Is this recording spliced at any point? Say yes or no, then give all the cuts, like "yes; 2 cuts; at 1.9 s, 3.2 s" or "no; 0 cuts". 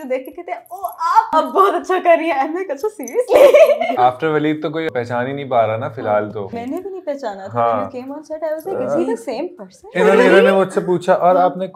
yes; 4 cuts; at 1.3 s, 3.9 s, 4.9 s, 6.5 s